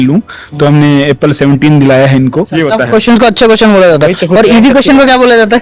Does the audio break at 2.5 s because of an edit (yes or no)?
yes